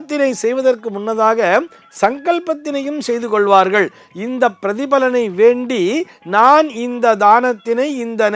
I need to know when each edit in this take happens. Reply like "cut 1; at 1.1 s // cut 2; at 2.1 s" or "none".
none